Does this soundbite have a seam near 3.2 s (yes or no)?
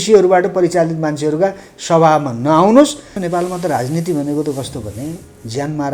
yes